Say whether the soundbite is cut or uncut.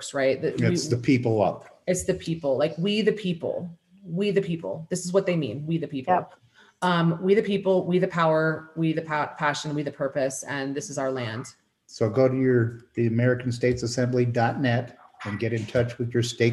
uncut